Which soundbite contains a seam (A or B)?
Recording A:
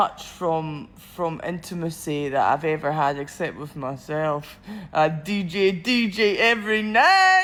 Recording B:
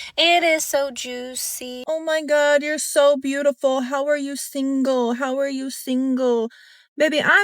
B